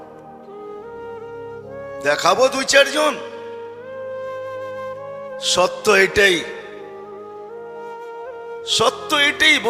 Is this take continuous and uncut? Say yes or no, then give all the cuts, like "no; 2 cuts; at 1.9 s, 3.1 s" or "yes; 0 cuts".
yes; 0 cuts